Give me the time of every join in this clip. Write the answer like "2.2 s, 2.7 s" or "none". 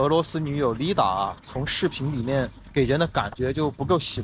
2.6 s